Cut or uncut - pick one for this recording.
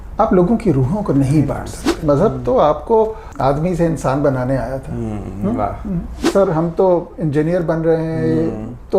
cut